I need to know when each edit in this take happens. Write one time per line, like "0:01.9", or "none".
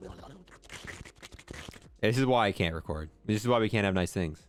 none